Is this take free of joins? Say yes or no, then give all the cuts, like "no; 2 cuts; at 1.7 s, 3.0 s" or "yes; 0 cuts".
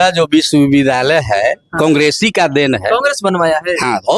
yes; 0 cuts